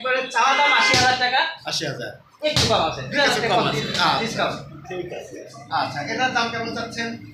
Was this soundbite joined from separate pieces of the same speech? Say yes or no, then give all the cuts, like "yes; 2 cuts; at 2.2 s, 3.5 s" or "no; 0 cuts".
yes; 1 cut; at 5.6 s